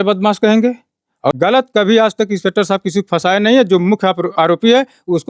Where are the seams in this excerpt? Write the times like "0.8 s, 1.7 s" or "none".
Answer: 1.3 s